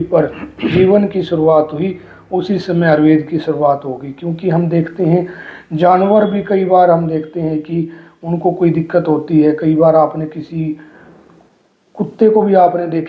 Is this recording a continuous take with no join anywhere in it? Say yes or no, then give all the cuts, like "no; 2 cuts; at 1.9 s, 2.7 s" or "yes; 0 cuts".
yes; 0 cuts